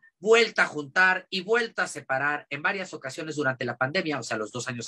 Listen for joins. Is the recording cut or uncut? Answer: uncut